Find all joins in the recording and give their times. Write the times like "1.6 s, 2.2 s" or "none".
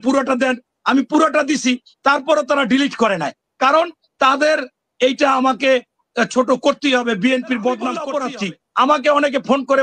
8.0 s